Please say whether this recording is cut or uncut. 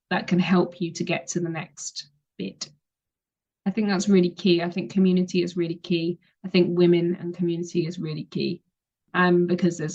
uncut